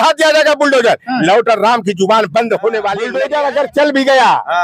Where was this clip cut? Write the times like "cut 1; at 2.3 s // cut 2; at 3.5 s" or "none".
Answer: cut 1; at 3.1 s